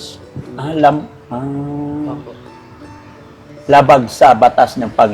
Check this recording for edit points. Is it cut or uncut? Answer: uncut